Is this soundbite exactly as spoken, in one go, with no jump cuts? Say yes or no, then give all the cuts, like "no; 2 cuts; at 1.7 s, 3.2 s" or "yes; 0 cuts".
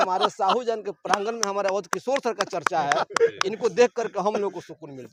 yes; 0 cuts